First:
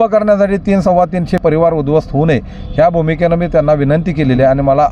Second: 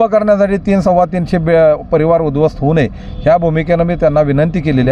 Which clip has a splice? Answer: first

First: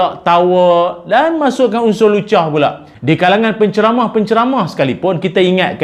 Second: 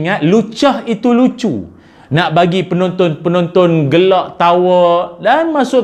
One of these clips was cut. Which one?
first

